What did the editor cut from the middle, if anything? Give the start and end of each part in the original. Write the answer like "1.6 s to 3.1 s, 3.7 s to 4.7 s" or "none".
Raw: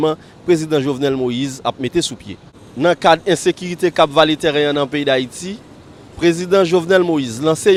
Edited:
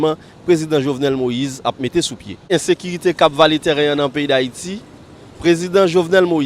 2.4 s to 3.2 s